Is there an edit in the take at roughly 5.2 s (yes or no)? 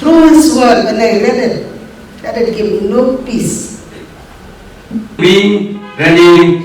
yes